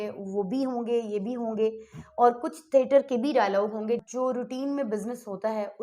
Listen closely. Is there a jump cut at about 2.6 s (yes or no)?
no